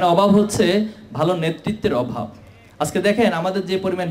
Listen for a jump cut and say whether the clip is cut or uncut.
uncut